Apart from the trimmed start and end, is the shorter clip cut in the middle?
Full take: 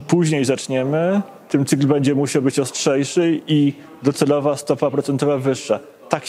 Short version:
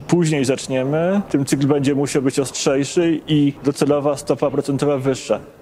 yes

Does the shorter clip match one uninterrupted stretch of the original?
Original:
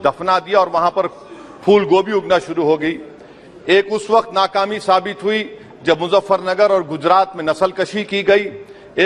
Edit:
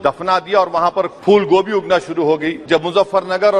no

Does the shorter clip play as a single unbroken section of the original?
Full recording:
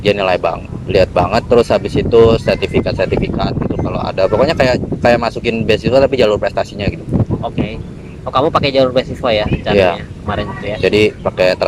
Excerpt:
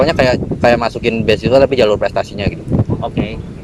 yes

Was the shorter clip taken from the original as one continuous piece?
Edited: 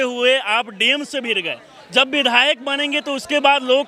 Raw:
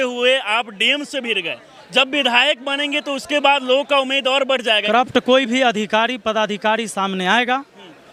yes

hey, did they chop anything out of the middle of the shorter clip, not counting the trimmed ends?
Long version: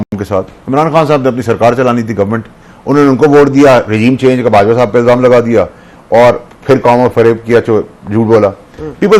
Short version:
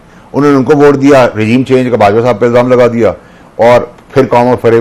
no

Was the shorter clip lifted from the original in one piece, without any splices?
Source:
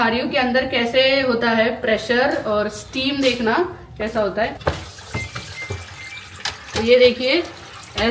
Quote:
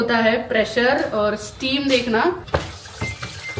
no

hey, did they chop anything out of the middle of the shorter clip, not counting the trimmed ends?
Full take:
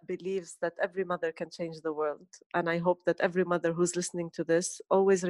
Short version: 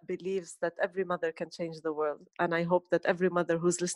yes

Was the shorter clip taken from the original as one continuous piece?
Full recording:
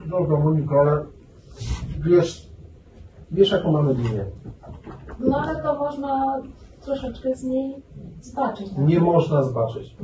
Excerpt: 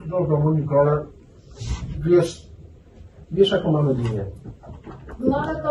yes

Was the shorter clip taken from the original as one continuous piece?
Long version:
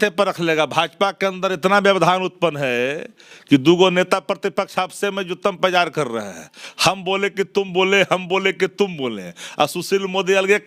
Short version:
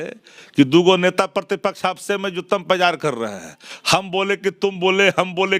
yes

